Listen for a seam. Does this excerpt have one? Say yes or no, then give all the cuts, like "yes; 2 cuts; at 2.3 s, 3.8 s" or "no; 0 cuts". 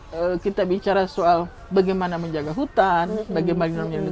yes; 1 cut; at 1.6 s